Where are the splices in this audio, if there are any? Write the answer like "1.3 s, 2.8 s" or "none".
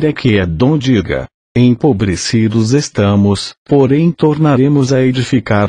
1.2 s

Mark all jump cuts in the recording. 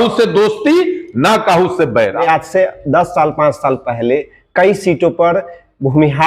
2.2 s

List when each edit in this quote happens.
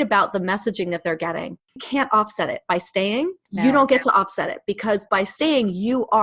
1.8 s, 3.4 s

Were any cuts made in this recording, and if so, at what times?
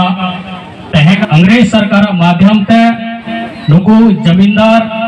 1.2 s

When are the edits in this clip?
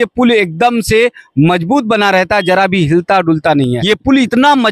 3.6 s

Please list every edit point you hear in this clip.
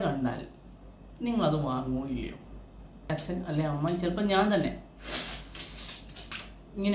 3.1 s

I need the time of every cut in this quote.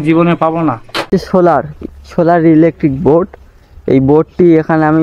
1.1 s

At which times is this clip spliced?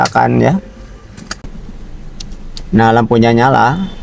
1.8 s

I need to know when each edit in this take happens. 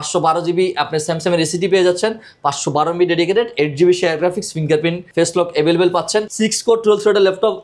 5.0 s, 6.3 s

